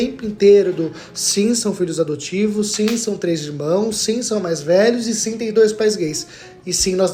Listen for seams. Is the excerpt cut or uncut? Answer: uncut